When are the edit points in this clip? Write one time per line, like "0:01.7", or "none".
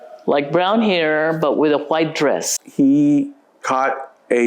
0:02.6